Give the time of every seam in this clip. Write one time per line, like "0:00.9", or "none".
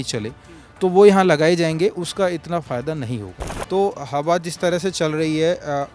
0:03.5